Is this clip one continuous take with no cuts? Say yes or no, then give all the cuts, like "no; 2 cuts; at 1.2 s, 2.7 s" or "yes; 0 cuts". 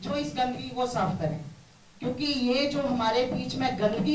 yes; 0 cuts